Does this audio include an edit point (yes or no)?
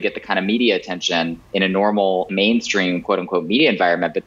yes